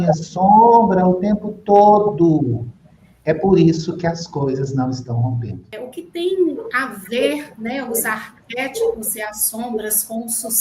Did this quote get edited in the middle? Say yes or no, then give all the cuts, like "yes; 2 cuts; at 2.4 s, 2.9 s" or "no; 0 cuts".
yes; 1 cut; at 5.8 s